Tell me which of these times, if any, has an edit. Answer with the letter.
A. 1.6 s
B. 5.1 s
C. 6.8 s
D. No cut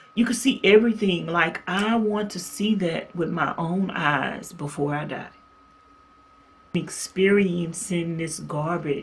C